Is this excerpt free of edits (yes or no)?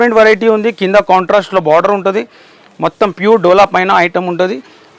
yes